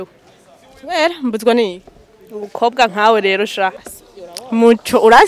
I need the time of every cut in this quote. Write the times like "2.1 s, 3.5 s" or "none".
3.8 s